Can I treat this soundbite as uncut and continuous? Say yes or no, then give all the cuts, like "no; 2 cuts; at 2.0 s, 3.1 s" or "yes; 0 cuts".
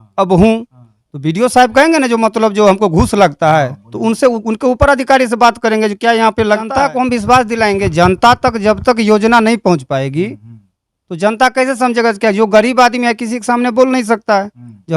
no; 1 cut; at 6.7 s